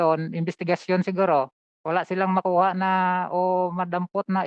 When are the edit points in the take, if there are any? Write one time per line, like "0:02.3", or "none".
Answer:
none